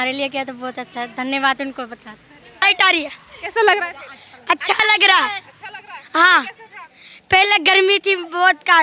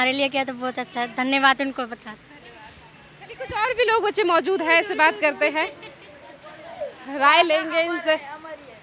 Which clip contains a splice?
first; 1 cut; at 2.6 s

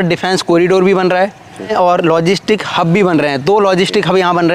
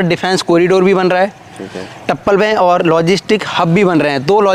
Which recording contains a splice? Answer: first; 1 cut; at 1.7 s

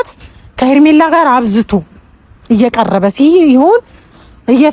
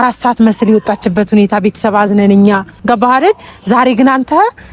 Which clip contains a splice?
second; 1 cut; at 2.7 s

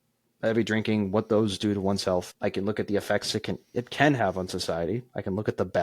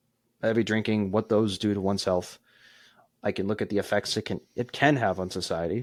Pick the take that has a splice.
first; 1 cut; at 2.3 s

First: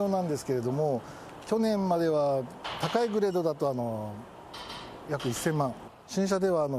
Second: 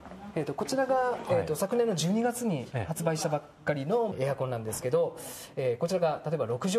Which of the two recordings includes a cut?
second; 1 cut; at 4.1 s

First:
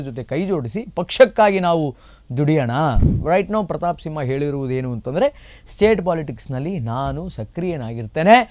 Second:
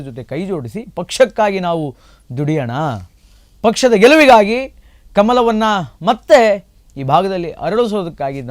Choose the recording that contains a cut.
first; 1 cut; at 3.2 s

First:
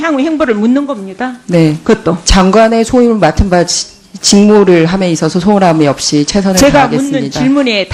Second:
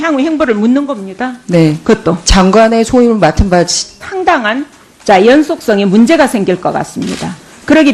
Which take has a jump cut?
first; 1 cut; at 4.1 s

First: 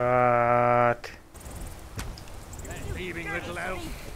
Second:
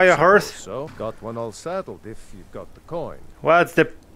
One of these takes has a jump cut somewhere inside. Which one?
second; 2 cuts; at 0.9 s, 3.3 s

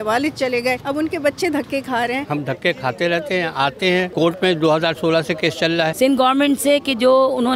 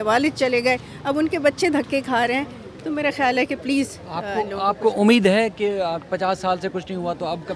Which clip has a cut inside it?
first; 4 cuts; at 0.8 s, 2.2 s, 4.1 s, 5.9 s

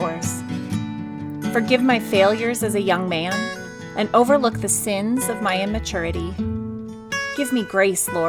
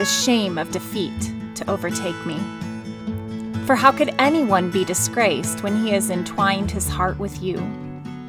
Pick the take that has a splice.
first; 2 cuts; at 6.3 s, 7.3 s

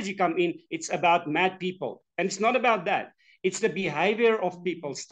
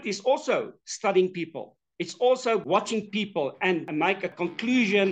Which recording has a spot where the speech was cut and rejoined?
second; 2 cuts; at 2.6 s, 4.1 s

